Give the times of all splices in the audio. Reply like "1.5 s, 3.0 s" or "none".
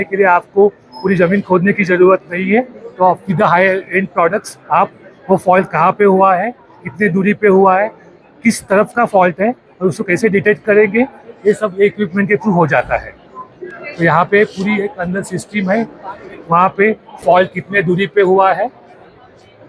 none

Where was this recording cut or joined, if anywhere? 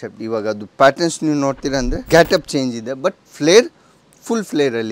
2.0 s

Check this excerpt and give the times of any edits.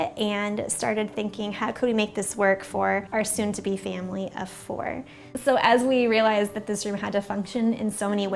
none

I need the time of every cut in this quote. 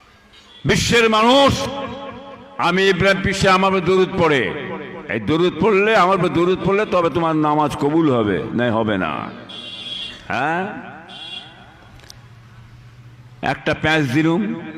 1.7 s

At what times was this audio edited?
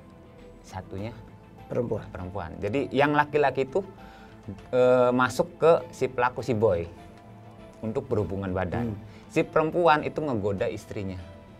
none

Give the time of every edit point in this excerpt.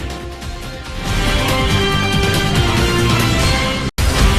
none

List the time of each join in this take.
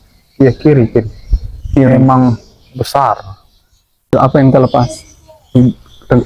4.1 s

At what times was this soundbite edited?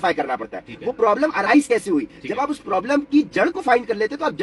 none

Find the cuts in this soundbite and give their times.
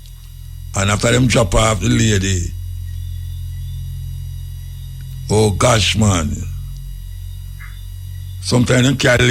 none

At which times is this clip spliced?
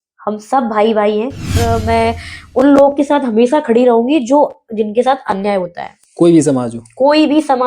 1.6 s

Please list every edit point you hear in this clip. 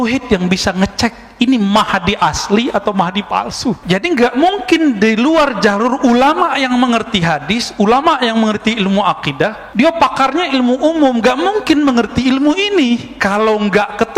3.8 s, 13.1 s

